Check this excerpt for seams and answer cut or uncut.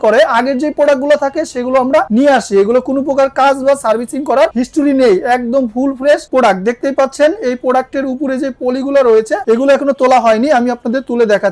uncut